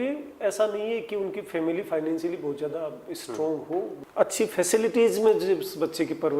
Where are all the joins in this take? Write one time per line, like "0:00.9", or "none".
0:04.0